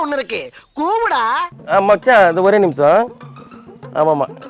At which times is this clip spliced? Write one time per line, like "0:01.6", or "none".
0:01.6